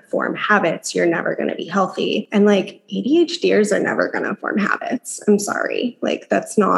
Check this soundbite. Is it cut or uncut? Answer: cut